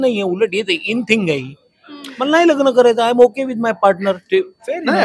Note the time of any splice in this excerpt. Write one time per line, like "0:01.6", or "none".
none